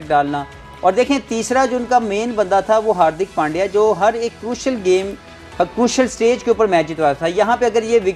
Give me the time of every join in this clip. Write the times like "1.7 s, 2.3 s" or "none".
none